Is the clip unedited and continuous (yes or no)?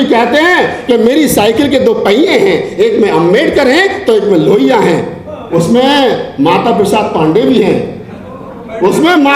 yes